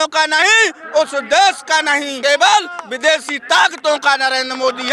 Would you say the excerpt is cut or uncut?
cut